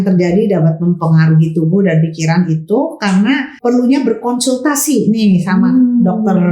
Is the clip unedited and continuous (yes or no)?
no